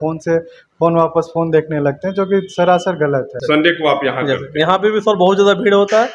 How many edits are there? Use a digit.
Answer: 1